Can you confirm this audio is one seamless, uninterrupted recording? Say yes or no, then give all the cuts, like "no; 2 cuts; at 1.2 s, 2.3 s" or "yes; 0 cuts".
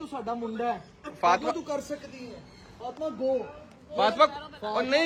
yes; 0 cuts